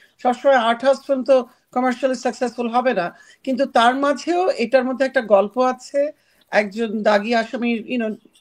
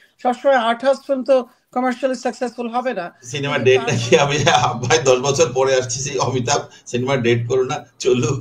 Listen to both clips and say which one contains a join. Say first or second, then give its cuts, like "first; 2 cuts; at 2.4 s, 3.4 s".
second; 1 cut; at 3.2 s